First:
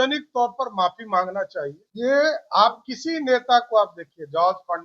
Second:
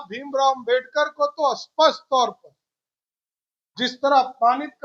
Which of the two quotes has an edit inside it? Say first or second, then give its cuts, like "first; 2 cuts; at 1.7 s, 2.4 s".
first; 1 cut; at 1.8 s